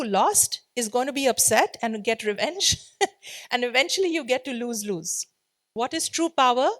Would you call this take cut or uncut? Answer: cut